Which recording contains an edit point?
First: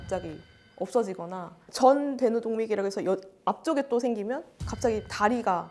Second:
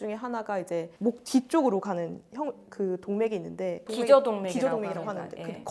first; 1 cut; at 1.7 s

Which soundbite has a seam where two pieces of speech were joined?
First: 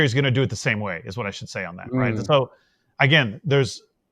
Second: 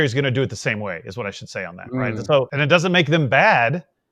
second; 1 cut; at 2.5 s

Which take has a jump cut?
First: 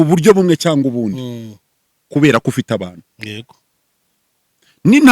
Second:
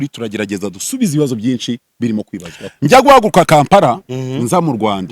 second; 1 cut; at 2.6 s

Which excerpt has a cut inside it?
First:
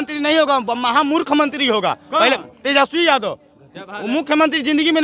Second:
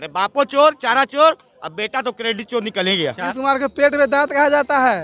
second; 1 cut; at 3.2 s

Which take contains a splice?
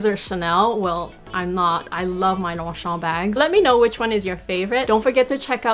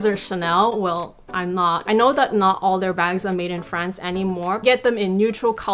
second; 2 cuts; at 1.9 s, 4.6 s

